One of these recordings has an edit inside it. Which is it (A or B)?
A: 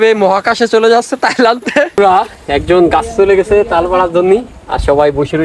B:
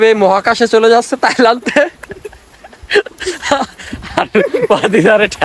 A